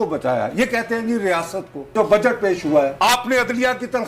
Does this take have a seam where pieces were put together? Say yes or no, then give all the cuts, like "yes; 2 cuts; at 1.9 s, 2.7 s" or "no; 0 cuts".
yes; 2 cuts; at 1.9 s, 2.9 s